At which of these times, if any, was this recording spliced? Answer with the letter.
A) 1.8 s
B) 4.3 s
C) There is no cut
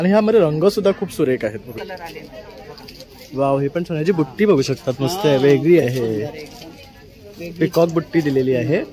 A